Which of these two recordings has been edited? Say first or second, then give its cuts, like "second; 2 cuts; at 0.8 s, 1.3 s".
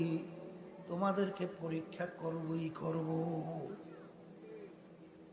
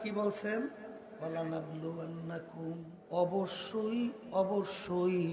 second; 1 cut; at 2.9 s